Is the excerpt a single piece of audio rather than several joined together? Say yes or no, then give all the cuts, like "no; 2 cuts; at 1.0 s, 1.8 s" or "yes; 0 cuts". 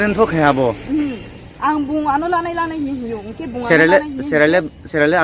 yes; 0 cuts